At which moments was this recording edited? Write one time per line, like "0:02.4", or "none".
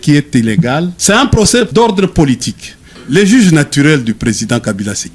0:00.9
0:01.7
0:02.9